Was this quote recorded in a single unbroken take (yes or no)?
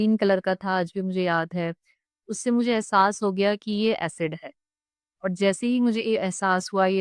yes